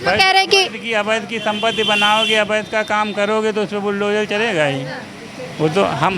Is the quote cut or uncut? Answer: uncut